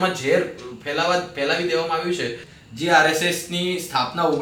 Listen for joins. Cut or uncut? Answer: cut